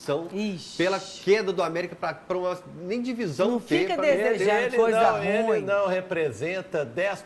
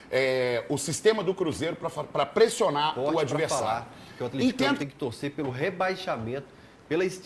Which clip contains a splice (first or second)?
second